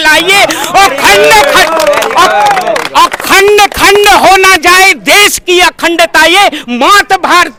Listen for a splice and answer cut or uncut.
uncut